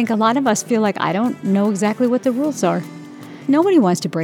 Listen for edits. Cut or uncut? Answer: cut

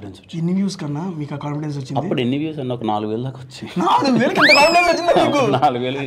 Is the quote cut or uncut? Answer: uncut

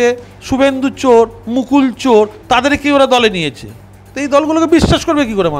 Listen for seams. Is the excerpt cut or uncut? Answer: uncut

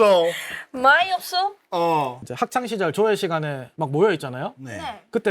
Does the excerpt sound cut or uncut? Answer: cut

